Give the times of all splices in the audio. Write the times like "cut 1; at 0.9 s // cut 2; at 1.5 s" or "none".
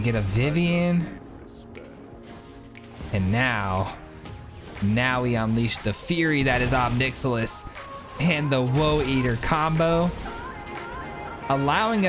cut 1; at 2.4 s

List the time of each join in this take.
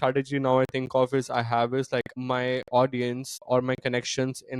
cut 1; at 2.1 s // cut 2; at 3.4 s

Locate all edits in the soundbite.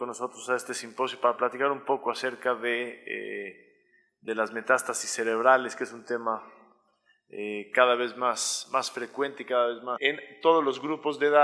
none

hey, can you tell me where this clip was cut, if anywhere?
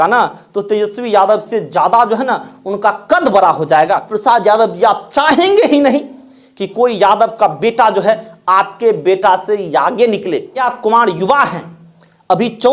cut 1; at 4.1 s // cut 2; at 10.7 s

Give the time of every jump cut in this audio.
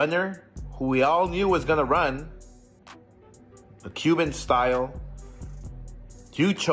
none

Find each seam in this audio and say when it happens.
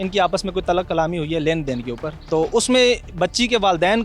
cut 1; at 2.1 s

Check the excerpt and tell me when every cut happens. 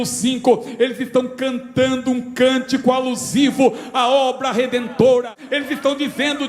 cut 1; at 5.4 s

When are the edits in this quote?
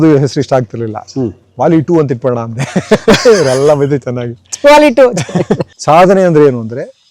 cut 1; at 5.7 s

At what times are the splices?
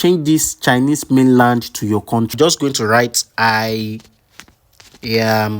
cut 1; at 2.3 s

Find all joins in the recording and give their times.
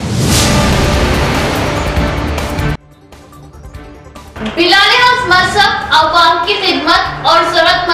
cut 1; at 2.6 s // cut 2; at 4.3 s

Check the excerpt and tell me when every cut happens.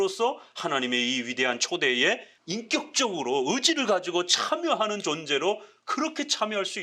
cut 1; at 2.3 s

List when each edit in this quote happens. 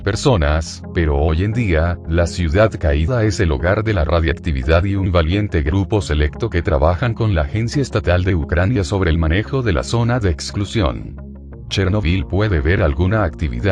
none

